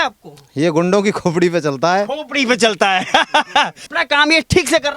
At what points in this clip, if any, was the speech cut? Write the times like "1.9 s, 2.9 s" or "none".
3.8 s